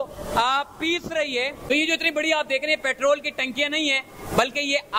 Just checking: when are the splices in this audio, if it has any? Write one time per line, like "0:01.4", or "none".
0:01.7